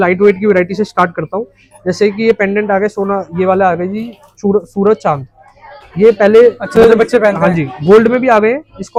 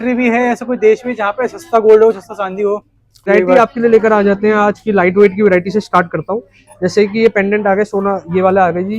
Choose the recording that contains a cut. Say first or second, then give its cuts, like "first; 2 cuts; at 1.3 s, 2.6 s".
second; 1 cut; at 3.3 s